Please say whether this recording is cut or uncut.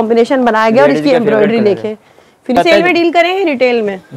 cut